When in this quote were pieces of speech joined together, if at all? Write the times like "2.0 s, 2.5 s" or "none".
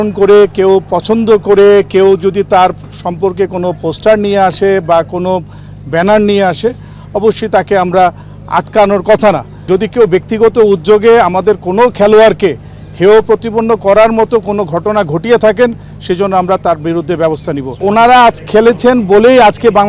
9.5 s, 17.8 s